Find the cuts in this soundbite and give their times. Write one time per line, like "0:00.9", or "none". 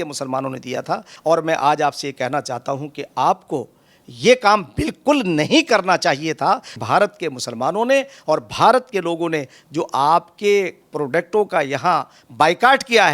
0:01.1
0:06.8

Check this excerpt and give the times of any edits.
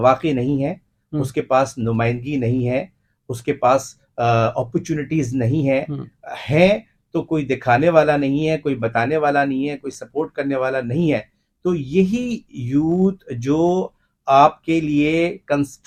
none

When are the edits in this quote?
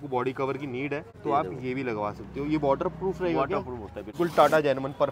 0:01.1
0:04.1

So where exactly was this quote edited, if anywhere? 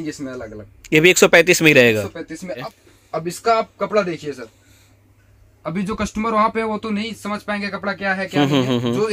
0:02.7

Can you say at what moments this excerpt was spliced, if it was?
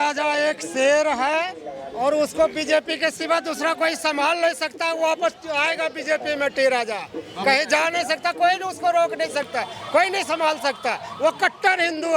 none

